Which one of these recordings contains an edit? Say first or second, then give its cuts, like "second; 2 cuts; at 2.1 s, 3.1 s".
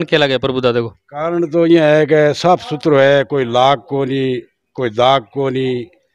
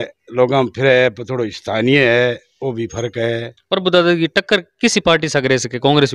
second; 1 cut; at 3.5 s